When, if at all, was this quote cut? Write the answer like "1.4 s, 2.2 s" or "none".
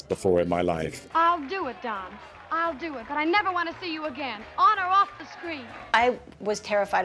1.0 s, 5.8 s